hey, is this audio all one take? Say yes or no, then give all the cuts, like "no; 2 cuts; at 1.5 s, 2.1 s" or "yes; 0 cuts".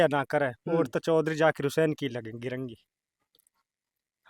yes; 0 cuts